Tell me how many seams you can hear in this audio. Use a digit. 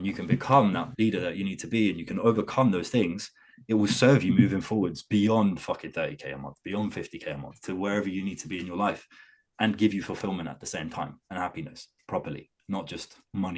0